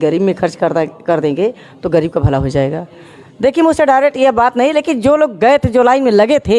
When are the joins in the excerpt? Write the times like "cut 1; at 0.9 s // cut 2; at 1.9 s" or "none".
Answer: none